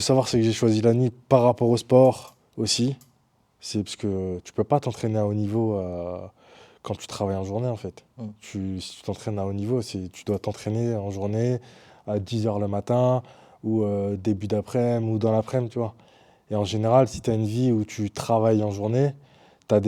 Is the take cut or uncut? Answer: uncut